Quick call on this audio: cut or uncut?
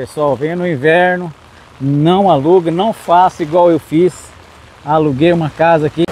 uncut